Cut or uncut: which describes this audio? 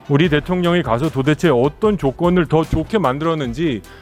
uncut